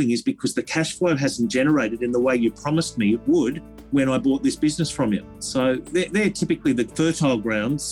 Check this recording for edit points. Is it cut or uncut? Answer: cut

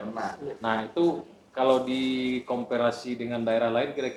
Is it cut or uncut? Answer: uncut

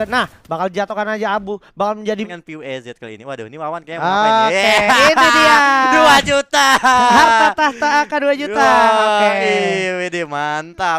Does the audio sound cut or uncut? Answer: cut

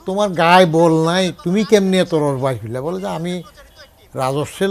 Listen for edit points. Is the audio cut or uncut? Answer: uncut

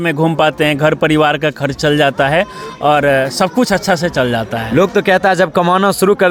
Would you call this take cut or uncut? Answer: uncut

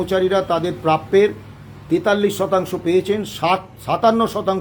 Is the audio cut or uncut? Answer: uncut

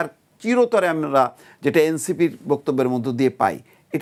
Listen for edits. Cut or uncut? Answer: uncut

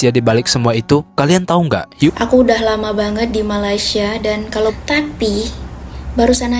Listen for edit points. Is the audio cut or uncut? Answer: cut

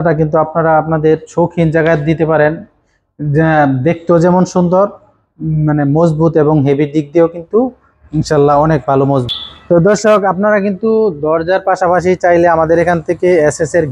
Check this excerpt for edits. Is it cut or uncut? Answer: cut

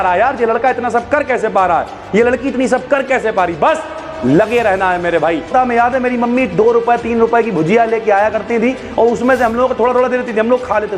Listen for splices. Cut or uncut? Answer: cut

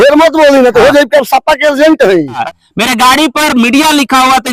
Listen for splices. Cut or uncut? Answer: cut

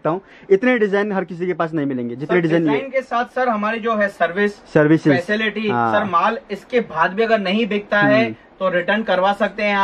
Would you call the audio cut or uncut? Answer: uncut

